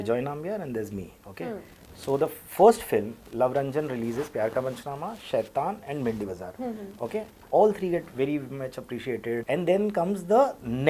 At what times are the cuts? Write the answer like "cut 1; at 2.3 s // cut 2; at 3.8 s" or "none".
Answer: cut 1; at 9.4 s